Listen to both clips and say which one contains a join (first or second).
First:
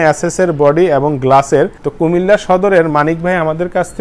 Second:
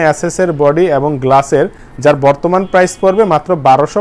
first